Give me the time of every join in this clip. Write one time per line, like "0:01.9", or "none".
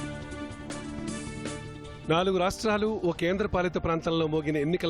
0:02.0